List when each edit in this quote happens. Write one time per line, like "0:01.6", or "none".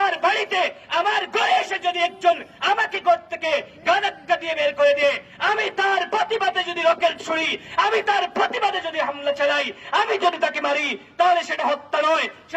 none